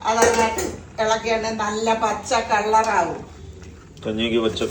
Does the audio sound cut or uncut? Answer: uncut